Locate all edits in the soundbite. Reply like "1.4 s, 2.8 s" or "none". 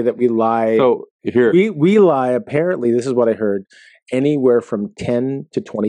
none